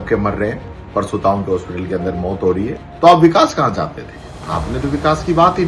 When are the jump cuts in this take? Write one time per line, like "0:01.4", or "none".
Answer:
0:02.8